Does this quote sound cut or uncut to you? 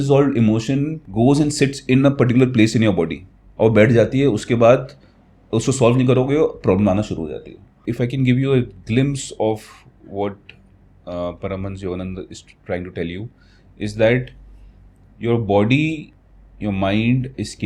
cut